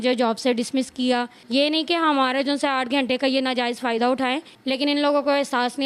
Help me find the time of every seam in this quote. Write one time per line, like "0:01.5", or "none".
0:01.4
0:04.5